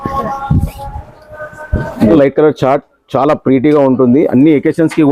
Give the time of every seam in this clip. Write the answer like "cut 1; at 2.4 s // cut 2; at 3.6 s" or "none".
cut 1; at 2.1 s